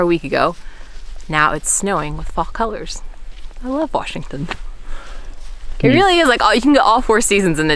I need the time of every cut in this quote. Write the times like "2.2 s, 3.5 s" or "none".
none